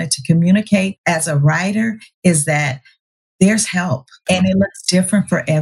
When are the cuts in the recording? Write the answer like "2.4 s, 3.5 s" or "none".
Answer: 1.0 s, 4.2 s